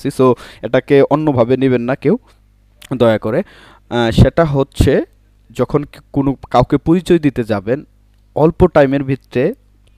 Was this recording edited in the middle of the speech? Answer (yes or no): no